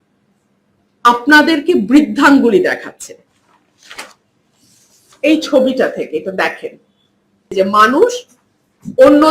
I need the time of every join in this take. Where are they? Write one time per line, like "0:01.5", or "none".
0:07.5